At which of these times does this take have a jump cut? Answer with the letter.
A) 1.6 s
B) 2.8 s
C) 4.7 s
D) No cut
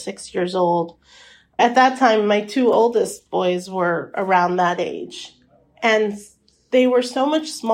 A